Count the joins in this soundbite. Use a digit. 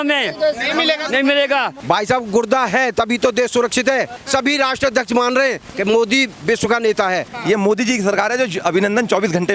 3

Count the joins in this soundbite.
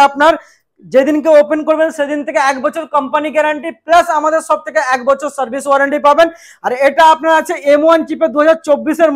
0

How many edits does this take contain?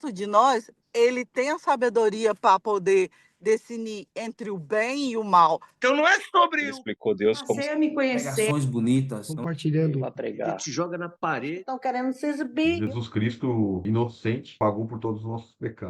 1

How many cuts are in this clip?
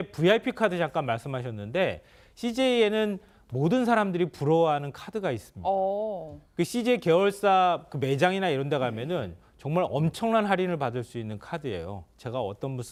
0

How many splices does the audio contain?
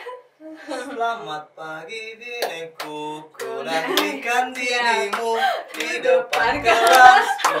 0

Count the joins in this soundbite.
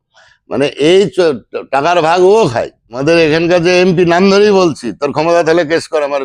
1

